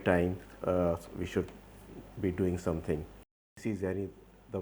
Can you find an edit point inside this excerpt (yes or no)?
yes